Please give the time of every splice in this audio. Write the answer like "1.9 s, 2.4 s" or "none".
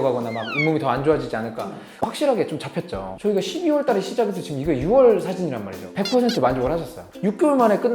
1.8 s, 7.0 s